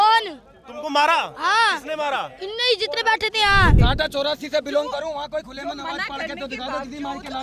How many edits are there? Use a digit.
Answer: 1